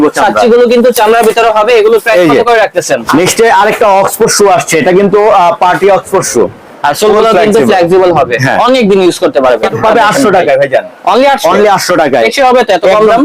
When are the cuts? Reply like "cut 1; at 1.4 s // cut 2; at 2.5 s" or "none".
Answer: cut 1; at 3.0 s // cut 2; at 6.6 s // cut 3; at 9.7 s